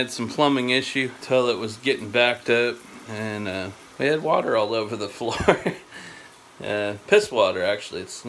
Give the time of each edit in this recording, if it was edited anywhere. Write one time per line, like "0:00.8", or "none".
0:01.2
0:03.8